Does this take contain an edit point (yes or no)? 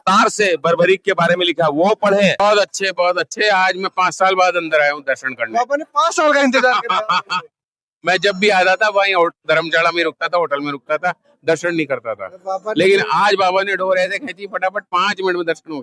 yes